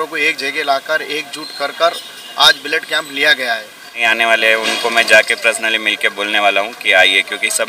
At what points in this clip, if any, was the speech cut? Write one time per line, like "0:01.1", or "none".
0:04.0